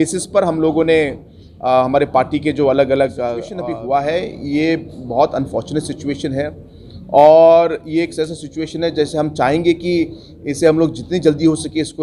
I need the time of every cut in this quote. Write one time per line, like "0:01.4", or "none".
0:03.6